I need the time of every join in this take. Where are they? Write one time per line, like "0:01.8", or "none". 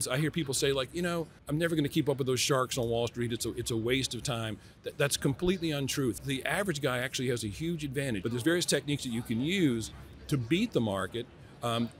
0:01.4
0:06.2
0:08.2